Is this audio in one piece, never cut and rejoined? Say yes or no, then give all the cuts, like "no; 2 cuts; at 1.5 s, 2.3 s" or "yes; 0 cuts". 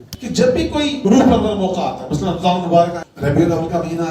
no; 2 cuts; at 1.0 s, 3.1 s